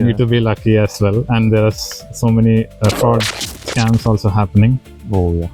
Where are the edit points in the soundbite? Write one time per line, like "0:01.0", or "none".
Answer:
none